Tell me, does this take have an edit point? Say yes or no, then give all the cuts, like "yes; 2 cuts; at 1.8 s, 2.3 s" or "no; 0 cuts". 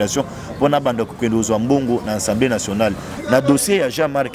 yes; 1 cut; at 3.2 s